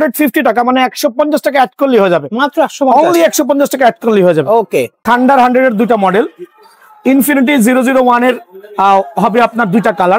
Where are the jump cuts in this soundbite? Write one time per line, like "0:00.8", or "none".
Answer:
0:04.9